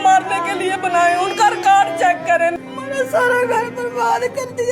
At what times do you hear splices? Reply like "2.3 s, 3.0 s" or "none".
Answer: 2.5 s